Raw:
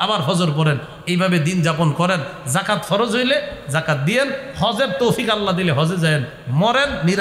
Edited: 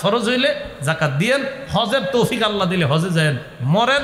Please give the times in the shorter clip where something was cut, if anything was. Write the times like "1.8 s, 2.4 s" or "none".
none